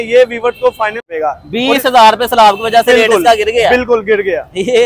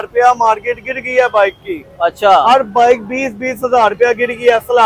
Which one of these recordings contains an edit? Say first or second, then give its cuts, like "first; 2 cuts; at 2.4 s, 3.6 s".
first; 1 cut; at 1.1 s